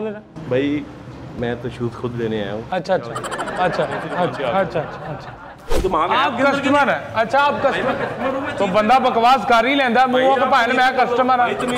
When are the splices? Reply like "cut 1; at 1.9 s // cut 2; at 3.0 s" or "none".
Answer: cut 1; at 5.7 s